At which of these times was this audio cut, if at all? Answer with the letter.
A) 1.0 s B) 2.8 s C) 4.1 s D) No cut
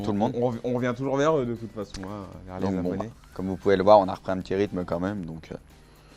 A